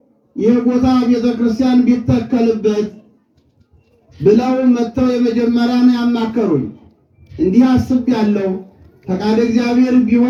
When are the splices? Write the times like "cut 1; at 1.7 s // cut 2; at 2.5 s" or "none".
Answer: none